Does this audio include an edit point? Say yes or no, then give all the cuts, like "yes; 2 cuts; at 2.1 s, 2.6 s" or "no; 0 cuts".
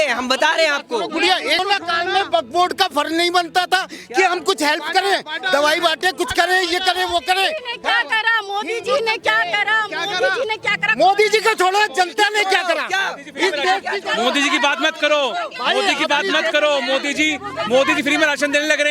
yes; 1 cut; at 1.6 s